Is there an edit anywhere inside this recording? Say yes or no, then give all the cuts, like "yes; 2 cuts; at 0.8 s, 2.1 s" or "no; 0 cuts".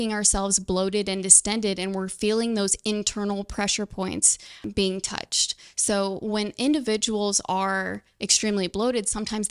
yes; 1 cut; at 4.6 s